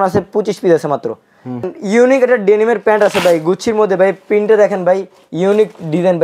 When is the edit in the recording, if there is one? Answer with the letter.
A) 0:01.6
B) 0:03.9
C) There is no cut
A